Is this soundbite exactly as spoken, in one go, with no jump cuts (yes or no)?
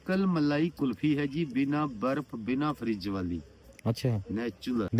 yes